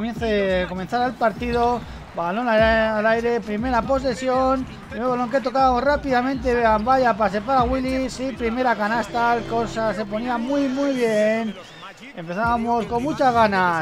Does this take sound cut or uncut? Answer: cut